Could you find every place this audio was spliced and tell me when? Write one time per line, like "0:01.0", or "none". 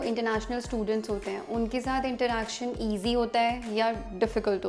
none